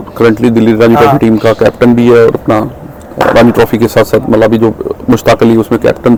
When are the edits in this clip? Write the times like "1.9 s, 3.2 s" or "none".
none